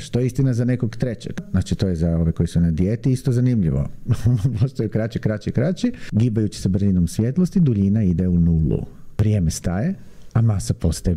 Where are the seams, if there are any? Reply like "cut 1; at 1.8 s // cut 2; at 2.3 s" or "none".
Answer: cut 1; at 1.4 s // cut 2; at 6.0 s // cut 3; at 9.0 s